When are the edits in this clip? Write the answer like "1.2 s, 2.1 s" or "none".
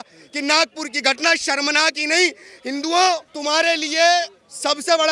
3.3 s